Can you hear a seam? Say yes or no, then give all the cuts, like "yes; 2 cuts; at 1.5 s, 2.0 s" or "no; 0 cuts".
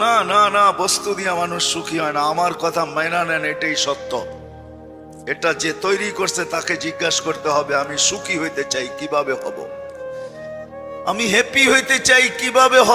no; 0 cuts